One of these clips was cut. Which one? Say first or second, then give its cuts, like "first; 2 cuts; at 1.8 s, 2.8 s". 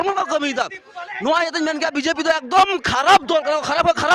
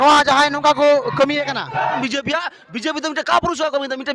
second; 1 cut; at 2.0 s